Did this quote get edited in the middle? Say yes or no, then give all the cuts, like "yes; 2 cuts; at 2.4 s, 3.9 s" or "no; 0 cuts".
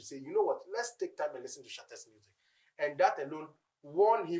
no; 0 cuts